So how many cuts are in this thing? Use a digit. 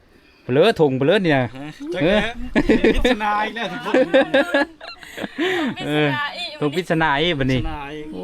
0